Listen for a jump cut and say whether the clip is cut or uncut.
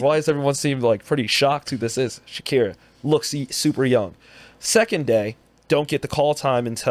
uncut